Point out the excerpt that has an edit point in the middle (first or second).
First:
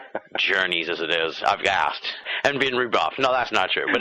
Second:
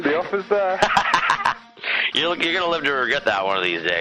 first